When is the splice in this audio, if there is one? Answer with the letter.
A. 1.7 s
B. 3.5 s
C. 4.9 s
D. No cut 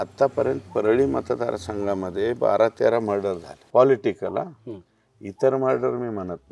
B